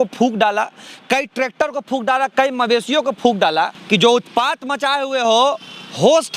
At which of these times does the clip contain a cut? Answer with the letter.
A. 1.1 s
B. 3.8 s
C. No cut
B